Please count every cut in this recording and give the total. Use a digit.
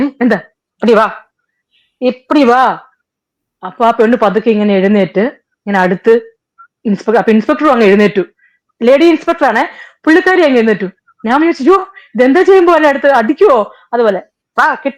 0